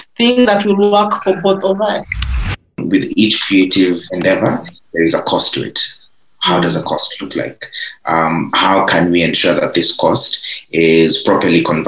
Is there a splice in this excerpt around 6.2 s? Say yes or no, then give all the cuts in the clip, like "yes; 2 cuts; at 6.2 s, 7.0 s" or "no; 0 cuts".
no; 2 cuts; at 2.7 s, 4.1 s